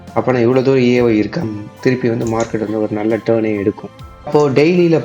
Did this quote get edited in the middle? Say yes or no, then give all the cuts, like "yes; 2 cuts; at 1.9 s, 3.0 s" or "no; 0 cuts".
yes; 2 cuts; at 1.4 s, 4.3 s